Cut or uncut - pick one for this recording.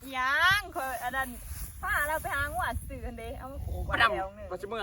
uncut